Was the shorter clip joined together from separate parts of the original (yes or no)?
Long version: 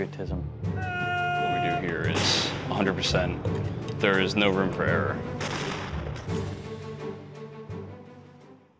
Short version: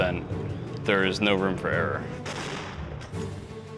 no